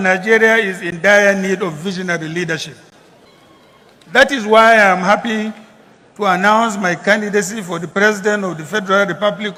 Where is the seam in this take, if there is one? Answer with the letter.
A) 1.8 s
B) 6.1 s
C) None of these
C